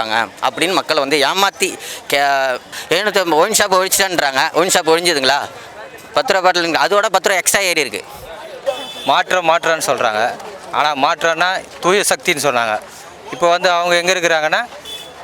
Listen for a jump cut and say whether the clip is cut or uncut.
cut